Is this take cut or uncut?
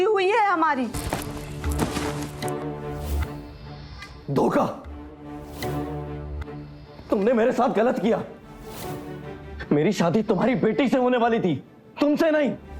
cut